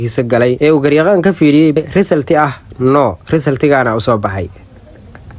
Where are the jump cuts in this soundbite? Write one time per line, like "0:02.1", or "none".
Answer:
0:01.8